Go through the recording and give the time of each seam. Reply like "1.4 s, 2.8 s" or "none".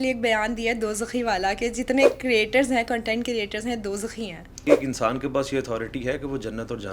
4.6 s